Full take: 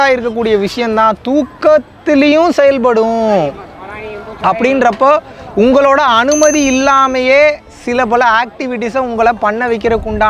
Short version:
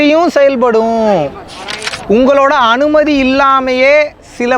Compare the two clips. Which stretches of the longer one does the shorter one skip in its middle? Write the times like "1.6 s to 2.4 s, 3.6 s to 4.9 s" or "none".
4.1 s to 5.4 s